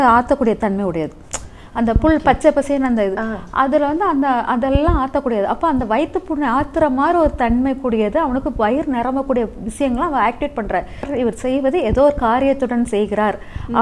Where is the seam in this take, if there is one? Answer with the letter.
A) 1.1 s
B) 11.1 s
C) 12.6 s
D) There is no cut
B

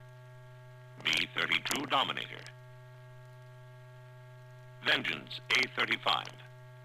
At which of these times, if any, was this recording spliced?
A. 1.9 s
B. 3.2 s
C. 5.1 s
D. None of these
D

